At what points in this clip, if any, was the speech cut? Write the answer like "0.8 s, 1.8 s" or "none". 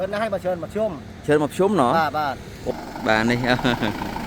2.5 s